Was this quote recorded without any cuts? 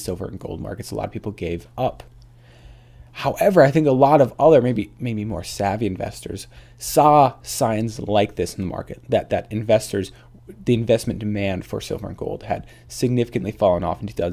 yes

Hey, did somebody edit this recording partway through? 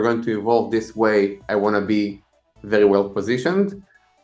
no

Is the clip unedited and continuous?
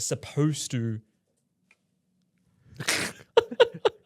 yes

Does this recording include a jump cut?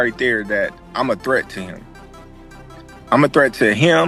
no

